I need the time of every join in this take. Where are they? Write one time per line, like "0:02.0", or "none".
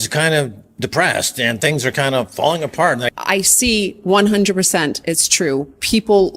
0:03.1